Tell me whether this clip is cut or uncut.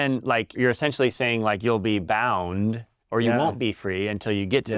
cut